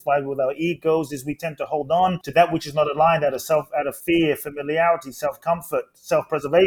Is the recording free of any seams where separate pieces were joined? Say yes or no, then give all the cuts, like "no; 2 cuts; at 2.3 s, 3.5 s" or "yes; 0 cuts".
no; 2 cuts; at 2.2 s, 4.0 s